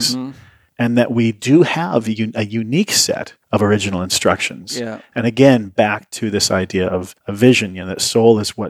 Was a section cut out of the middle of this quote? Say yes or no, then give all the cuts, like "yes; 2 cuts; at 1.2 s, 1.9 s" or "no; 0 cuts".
yes; 2 cuts; at 3.3 s, 7.2 s